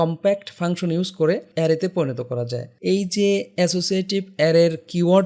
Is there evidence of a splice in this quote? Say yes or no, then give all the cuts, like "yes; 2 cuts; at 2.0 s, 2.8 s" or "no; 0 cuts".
yes; 2 cuts; at 1.5 s, 2.6 s